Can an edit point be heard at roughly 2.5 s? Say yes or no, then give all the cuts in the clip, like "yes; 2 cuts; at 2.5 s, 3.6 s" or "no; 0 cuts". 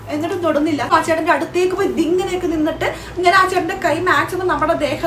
no; 1 cut; at 0.9 s